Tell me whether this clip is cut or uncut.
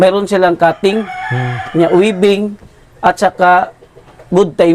uncut